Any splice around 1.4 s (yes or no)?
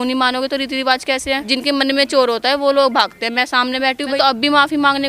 yes